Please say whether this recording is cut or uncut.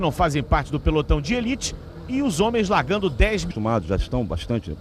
uncut